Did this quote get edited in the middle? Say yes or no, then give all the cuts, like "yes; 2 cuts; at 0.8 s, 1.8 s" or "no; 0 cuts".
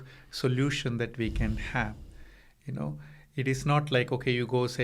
no; 0 cuts